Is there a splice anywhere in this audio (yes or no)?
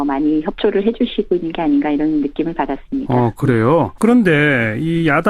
yes